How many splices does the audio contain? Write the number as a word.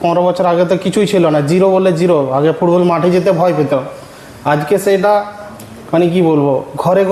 zero